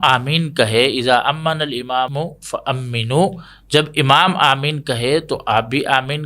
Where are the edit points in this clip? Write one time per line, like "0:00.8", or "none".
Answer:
0:02.1